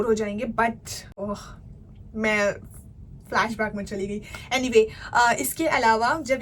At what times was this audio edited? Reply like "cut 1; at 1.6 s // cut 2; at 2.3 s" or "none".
cut 1; at 1.0 s